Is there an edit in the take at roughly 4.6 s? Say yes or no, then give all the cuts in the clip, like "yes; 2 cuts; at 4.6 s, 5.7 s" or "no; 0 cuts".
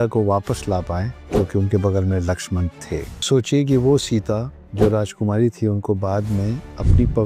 no; 2 cuts; at 1.2 s, 3.2 s